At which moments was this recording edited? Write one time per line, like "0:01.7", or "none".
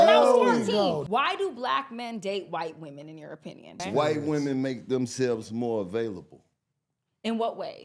0:01.0
0:03.8